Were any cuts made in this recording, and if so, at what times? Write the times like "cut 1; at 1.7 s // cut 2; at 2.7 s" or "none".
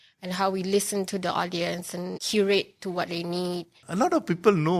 cut 1; at 2.2 s // cut 2; at 3.8 s